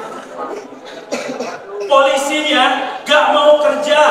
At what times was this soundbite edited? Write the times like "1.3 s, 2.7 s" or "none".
none